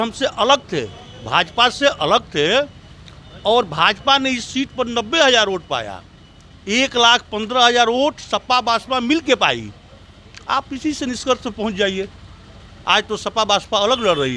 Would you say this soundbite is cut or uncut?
uncut